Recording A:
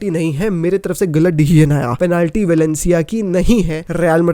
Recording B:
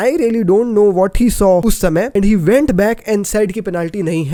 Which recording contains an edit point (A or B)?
A